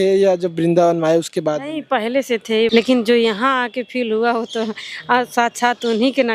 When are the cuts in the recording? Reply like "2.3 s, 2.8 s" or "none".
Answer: 2.7 s